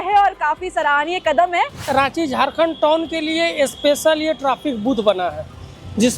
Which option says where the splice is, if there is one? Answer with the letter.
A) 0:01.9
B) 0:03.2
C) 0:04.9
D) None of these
A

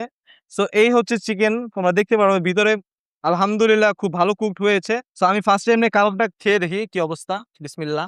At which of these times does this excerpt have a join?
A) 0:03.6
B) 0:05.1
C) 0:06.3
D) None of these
B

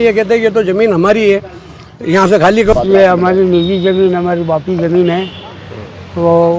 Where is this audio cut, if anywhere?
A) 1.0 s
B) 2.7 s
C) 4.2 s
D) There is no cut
B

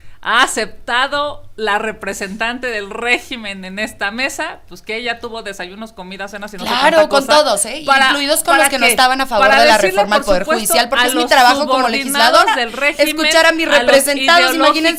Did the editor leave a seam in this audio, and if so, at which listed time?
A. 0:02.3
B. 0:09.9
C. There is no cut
C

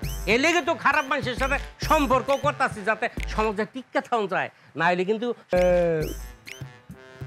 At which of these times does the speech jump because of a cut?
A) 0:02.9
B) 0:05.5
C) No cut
B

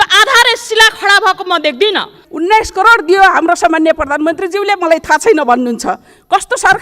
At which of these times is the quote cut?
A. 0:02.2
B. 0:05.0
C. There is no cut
A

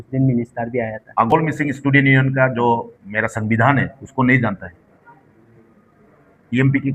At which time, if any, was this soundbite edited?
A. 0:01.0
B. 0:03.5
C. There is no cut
A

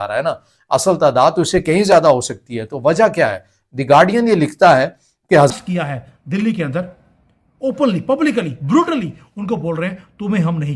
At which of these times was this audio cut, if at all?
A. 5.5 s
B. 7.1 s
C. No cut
A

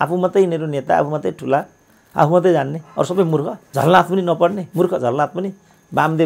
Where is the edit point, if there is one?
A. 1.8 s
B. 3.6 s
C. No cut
B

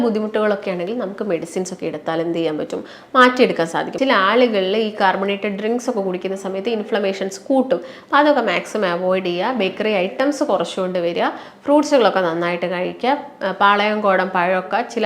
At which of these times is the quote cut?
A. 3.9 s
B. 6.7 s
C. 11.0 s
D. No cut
A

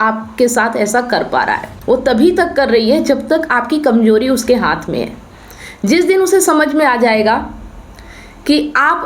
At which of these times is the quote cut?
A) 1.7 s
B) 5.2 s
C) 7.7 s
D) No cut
A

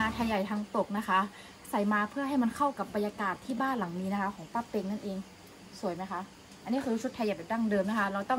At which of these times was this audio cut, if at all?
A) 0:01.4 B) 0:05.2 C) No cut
C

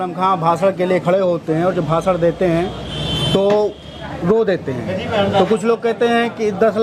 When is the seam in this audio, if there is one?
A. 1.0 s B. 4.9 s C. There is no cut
C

